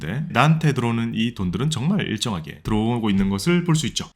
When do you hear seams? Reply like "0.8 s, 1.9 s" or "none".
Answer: 2.6 s